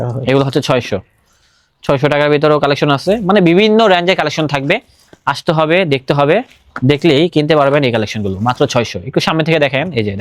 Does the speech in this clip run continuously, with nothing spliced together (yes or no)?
yes